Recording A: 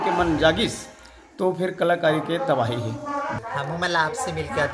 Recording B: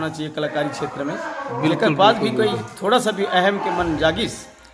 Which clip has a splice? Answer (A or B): A